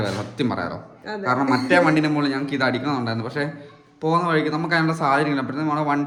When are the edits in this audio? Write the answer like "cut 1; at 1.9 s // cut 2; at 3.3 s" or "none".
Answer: none